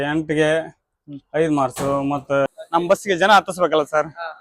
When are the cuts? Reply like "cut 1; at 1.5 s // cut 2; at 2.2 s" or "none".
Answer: cut 1; at 2.5 s